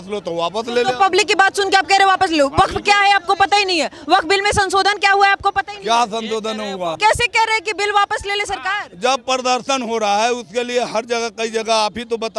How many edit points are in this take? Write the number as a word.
one